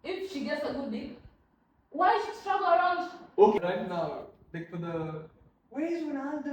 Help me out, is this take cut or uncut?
cut